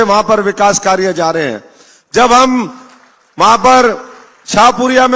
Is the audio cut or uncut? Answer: uncut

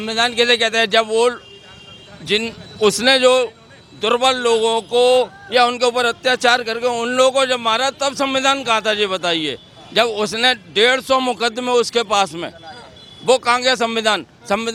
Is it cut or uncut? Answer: uncut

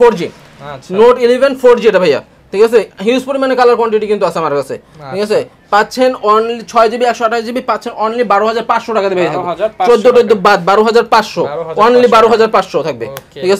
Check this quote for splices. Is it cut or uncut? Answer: uncut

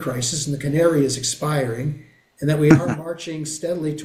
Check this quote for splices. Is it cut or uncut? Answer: uncut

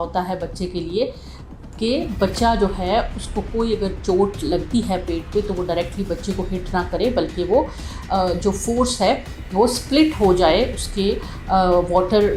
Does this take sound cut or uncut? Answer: uncut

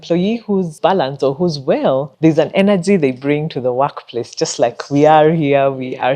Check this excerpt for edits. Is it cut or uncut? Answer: cut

